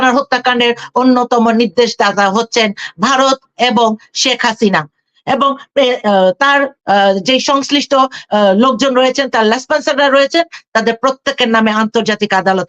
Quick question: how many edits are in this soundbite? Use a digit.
0